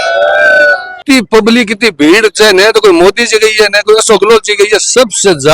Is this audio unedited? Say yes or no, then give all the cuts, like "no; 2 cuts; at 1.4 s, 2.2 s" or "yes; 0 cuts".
no; 1 cut; at 1.0 s